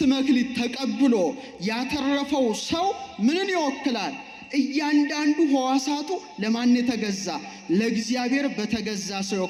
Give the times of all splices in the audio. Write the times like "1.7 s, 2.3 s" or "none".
none